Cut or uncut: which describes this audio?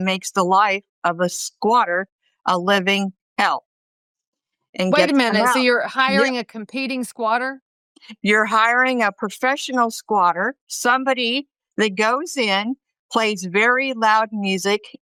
uncut